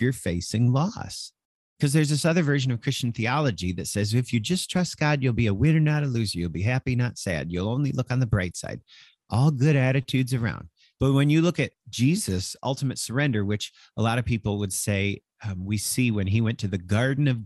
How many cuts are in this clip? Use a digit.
1